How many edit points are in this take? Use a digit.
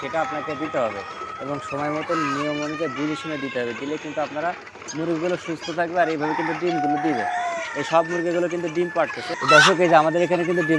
0